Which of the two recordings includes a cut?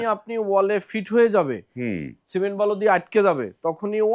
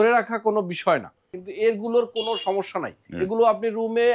second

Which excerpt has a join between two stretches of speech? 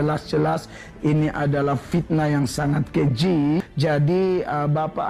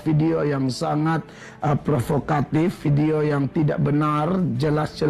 first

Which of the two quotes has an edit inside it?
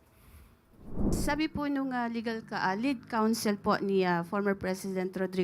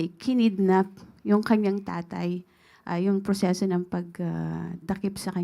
first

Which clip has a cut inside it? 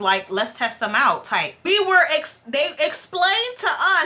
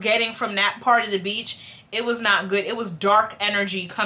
first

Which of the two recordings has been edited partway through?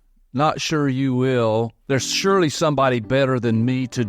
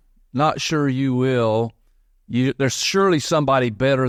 first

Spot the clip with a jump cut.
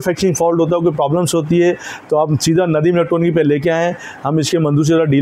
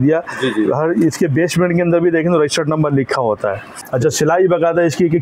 second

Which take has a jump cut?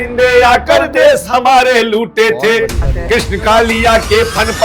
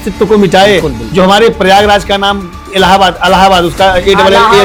first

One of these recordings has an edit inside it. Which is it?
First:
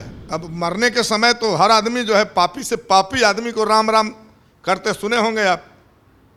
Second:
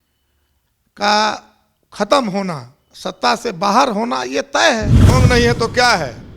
second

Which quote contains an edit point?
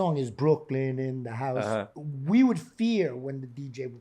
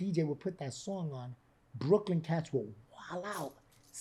first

